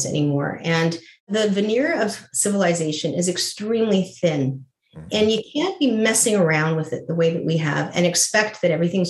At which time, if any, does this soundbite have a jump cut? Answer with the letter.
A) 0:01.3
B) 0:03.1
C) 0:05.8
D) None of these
A